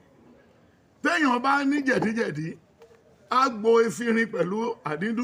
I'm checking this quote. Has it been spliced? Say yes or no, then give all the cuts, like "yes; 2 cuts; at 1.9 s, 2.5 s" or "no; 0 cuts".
no; 0 cuts